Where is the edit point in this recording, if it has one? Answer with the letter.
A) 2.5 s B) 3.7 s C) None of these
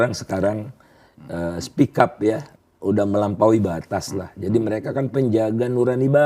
A